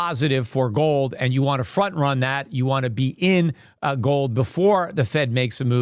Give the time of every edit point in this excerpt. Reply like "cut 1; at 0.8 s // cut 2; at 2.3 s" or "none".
none

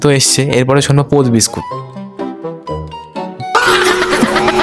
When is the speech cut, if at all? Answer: none

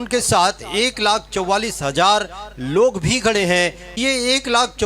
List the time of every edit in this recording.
cut 1; at 3.8 s

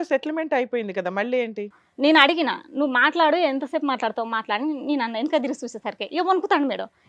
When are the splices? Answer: cut 1; at 1.8 s

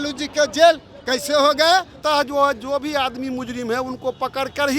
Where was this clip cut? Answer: cut 1; at 1.9 s

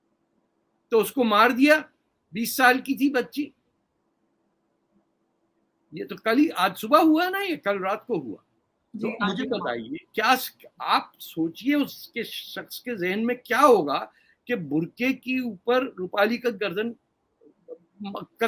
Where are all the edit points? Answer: none

